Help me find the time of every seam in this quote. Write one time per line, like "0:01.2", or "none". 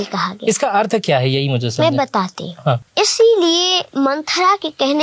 0:02.9
0:03.8